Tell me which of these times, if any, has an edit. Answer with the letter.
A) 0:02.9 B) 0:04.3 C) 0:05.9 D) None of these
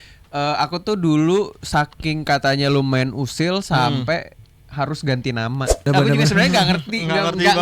C